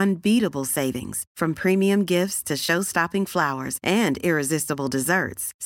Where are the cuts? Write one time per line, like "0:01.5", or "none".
none